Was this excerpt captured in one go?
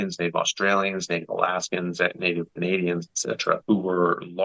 no; 2 cuts; at 2.5 s, 3.6 s

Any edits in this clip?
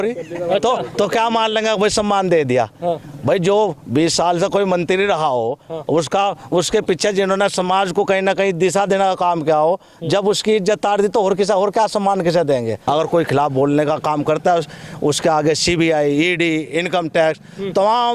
yes; 1 cut; at 12.8 s

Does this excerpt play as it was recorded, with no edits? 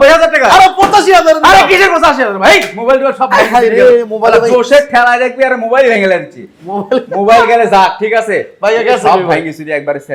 yes; 0 cuts

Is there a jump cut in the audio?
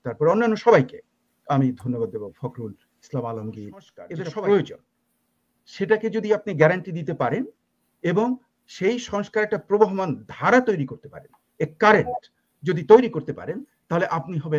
yes; 1 cut; at 4.0 s

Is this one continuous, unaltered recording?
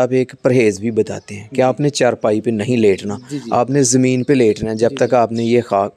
yes; 0 cuts

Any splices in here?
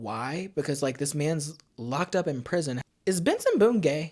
yes; 1 cut; at 2.8 s

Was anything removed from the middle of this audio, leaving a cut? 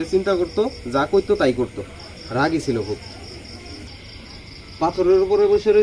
yes; 1 cut; at 3.9 s

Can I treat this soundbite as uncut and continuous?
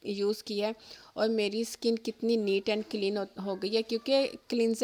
yes; 0 cuts

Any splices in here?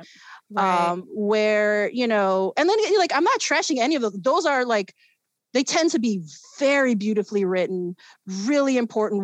no; 0 cuts

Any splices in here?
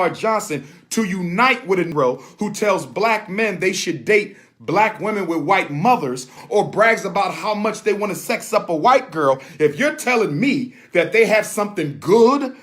yes; 2 cuts; at 1.9 s, 6.3 s

